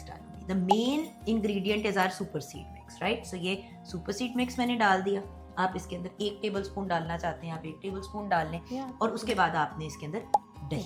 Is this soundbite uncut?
yes; 0 cuts

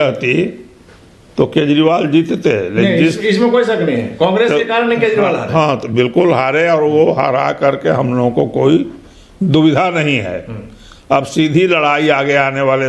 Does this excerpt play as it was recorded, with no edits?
yes; 0 cuts

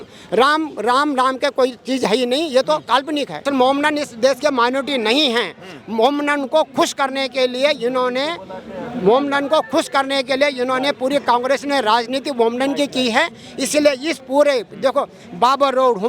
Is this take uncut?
no; 1 cut; at 3.4 s

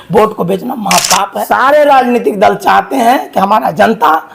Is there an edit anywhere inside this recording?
yes; 1 cut; at 1.4 s

